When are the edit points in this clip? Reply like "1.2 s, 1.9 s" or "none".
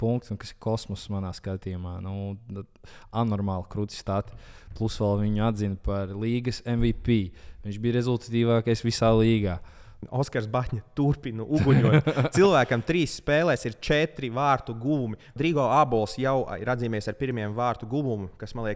10.1 s, 15.4 s